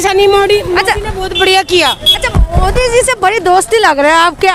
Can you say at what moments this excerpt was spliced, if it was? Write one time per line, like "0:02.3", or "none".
none